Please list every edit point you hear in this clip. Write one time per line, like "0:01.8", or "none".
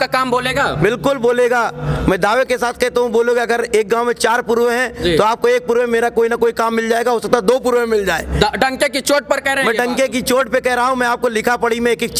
none

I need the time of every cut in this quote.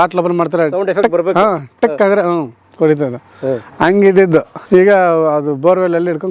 0:04.6

